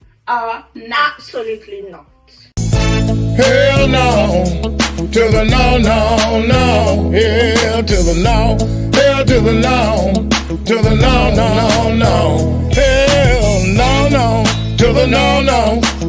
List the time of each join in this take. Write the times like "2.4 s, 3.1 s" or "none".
none